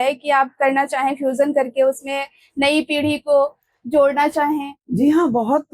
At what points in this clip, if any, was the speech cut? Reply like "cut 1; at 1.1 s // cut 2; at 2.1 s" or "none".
cut 1; at 4.8 s

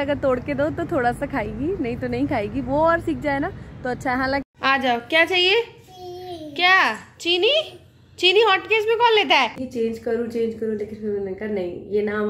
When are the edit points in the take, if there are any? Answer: cut 1; at 4.4 s // cut 2; at 10.0 s

